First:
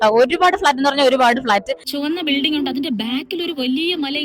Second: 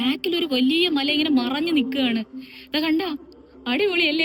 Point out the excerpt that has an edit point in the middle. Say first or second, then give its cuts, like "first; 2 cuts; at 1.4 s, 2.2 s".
first; 1 cut; at 1.9 s